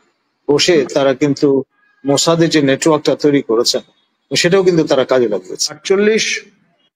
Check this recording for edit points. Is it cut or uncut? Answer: cut